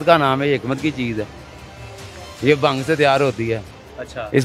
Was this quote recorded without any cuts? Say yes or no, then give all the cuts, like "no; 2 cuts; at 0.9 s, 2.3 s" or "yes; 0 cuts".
yes; 0 cuts